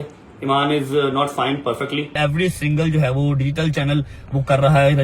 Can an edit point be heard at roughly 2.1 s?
yes; 1 cut; at 2.1 s

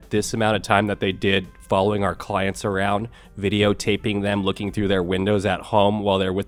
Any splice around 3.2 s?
no; 0 cuts

